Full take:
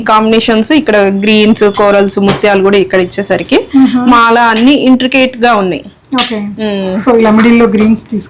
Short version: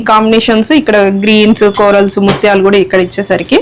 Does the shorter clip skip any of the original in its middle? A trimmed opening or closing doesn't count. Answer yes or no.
no